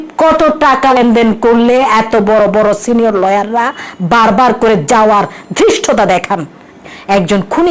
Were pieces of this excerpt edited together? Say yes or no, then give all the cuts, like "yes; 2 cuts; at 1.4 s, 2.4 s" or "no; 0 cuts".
yes; 2 cuts; at 0.9 s, 6.8 s